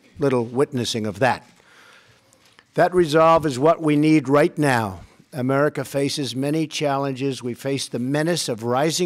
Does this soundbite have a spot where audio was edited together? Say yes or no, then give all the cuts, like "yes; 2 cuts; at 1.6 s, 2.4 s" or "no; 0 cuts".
yes; 1 cut; at 1.2 s